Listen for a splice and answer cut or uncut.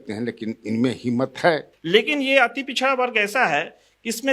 cut